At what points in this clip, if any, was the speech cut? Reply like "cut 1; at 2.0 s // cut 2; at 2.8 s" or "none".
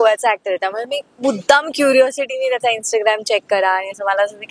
none